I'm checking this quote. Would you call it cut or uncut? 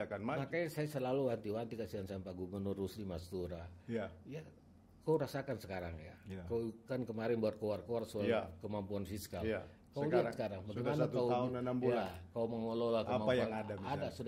uncut